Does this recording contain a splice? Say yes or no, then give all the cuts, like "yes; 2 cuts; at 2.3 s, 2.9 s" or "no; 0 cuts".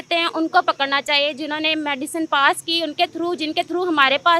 no; 0 cuts